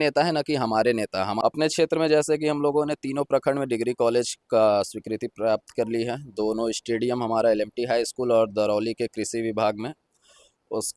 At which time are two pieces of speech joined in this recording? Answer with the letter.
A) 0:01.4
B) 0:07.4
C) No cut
A